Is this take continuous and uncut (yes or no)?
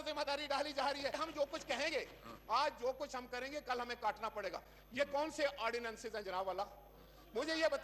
yes